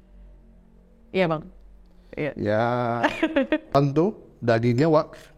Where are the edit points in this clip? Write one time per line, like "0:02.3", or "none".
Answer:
0:03.7